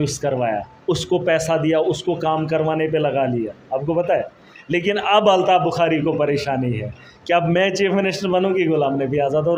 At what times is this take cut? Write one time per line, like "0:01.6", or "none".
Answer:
none